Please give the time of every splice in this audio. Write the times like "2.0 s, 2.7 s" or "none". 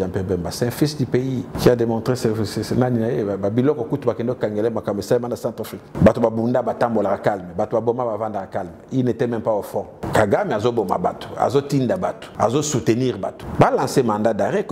1.5 s, 5.8 s, 10.0 s, 12.2 s, 13.4 s